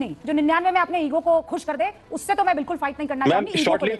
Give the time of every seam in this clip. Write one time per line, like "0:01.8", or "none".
none